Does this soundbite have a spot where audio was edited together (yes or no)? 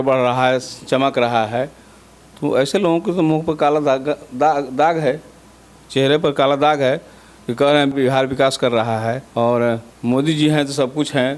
yes